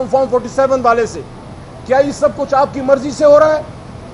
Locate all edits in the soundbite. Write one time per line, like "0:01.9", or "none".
none